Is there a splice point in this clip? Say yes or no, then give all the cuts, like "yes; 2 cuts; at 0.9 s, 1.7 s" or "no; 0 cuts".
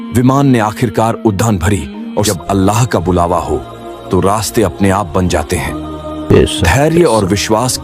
yes; 1 cut; at 2.3 s